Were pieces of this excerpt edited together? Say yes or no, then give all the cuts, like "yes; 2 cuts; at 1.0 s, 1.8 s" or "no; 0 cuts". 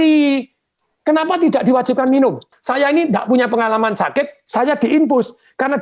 yes; 1 cut; at 2.5 s